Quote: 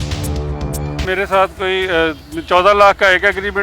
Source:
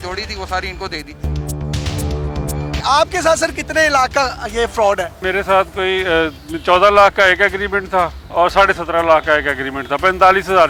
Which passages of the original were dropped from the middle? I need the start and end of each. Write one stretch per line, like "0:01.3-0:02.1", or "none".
0:02.7-0:05.1